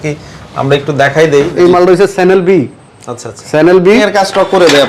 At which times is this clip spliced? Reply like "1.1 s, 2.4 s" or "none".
1.5 s, 4.0 s